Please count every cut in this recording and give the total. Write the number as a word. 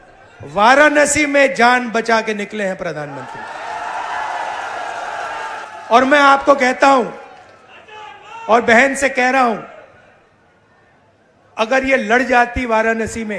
one